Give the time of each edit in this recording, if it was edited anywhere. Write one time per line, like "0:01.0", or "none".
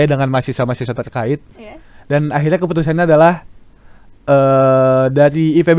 none